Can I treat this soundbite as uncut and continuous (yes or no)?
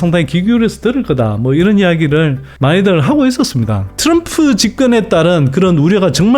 no